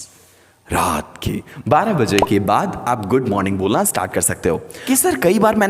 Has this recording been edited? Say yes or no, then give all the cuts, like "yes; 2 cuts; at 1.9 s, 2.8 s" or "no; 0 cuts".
yes; 1 cut; at 4.7 s